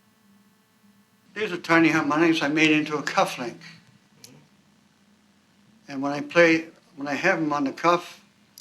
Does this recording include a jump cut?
yes; 1 cut; at 1.1 s

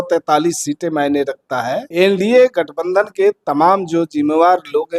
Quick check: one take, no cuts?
no; 1 cut; at 1.8 s

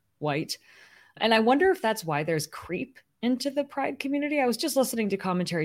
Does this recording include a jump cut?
no; 0 cuts

